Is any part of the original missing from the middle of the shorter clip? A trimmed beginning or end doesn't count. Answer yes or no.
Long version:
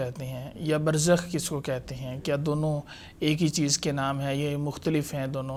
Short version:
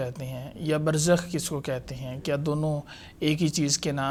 no